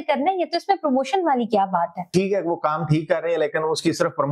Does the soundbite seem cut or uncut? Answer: uncut